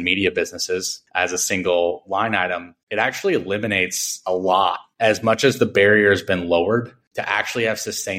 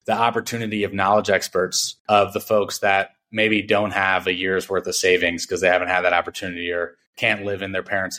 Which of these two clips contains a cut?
first; 1 cut; at 7.0 s

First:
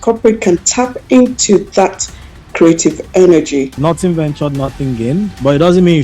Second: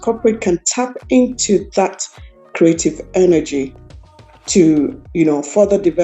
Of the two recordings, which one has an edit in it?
first; 1 cut; at 3.8 s

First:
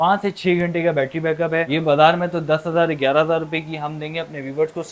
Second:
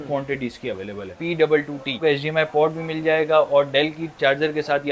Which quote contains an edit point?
second; 2 cuts; at 1.1 s, 2.0 s

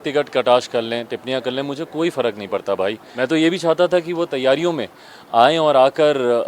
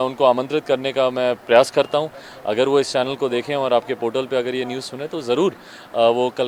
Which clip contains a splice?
first; 1 cut; at 3.1 s

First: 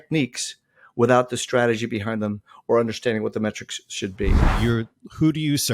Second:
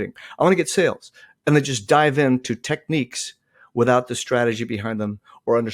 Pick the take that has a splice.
first; 1 cut; at 4.4 s

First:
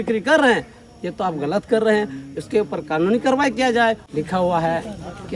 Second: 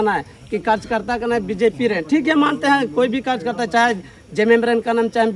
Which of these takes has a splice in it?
first; 1 cut; at 4.0 s

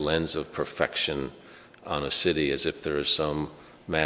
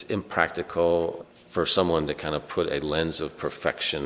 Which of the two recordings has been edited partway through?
second; 1 cut; at 1.2 s

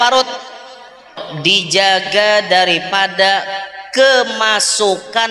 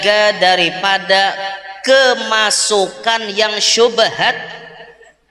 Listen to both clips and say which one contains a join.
first; 1 cut; at 1.2 s

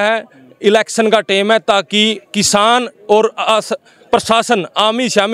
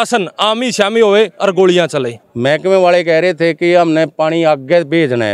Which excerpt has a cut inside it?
second; 1 cut; at 2.2 s

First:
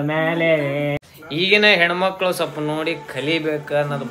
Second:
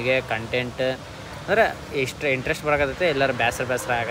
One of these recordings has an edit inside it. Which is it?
first; 1 cut; at 1.0 s

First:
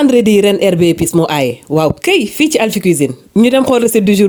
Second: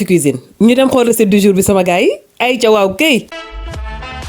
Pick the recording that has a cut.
second; 1 cut; at 3.3 s

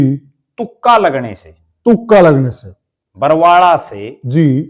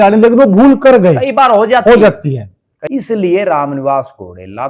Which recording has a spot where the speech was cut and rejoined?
second; 1 cut; at 2.8 s

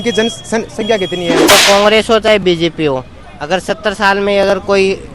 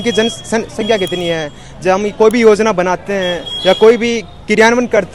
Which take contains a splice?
first; 1 cut; at 1.5 s

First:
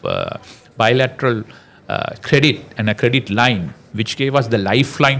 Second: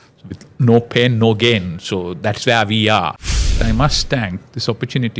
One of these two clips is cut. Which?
second; 1 cut; at 3.6 s

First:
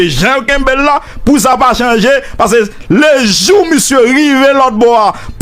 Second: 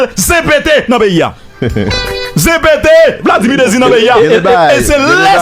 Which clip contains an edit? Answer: second; 1 cut; at 1.9 s

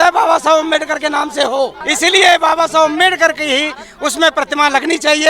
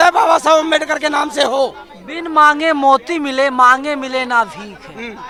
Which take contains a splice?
first; 1 cut; at 1.8 s

